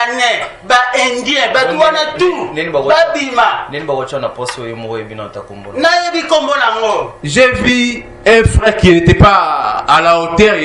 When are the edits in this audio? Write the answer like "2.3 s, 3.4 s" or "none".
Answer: 7.2 s